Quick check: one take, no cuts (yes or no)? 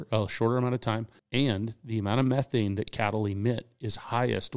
no